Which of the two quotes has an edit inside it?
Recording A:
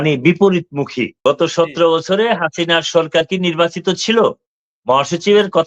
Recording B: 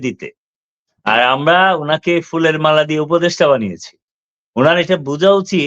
A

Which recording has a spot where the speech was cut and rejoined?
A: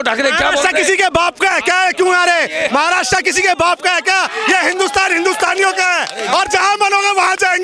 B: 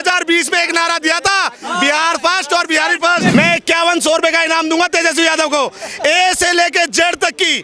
B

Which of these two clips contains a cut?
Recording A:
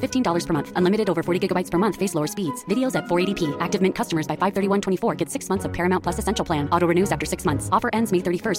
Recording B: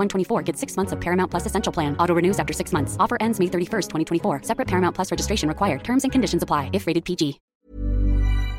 B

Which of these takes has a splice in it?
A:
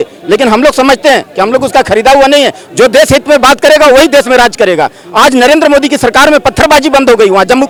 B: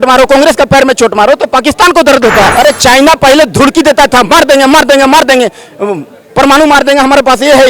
B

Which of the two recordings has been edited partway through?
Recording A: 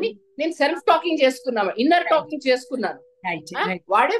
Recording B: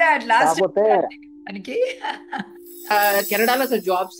B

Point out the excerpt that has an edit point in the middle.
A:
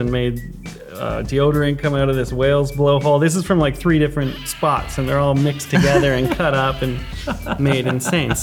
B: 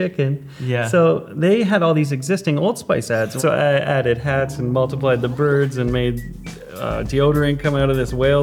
B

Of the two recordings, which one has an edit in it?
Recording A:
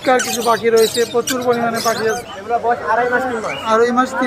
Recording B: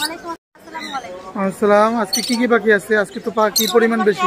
A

